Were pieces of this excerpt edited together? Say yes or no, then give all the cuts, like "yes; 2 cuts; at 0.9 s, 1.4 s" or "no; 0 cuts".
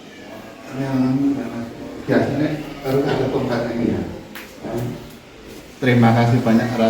yes; 1 cut; at 5.6 s